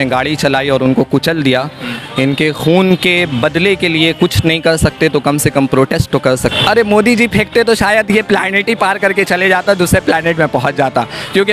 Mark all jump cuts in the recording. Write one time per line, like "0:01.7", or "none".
0:06.4

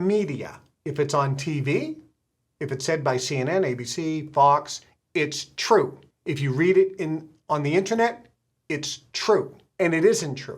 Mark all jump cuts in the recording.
0:06.1
0:09.6

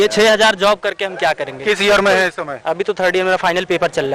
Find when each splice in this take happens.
none

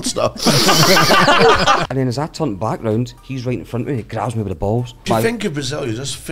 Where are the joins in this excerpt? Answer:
0:01.8
0:03.2
0:05.1

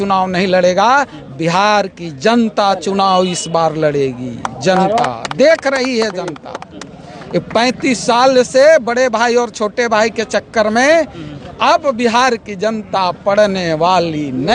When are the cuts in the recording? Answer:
none

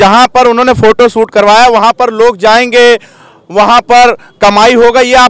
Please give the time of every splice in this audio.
none

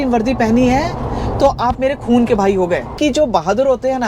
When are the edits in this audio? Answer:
0:02.9

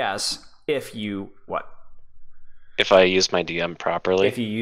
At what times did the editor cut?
none

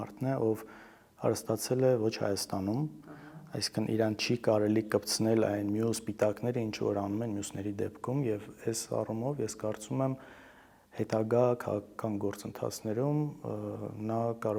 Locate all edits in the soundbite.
none

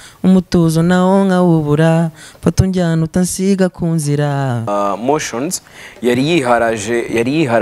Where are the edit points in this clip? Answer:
0:04.7

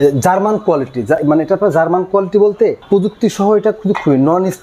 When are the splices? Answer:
none

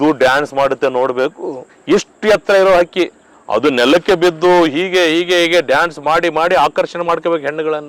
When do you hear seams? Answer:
none

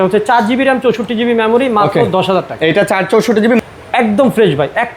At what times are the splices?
0:03.6

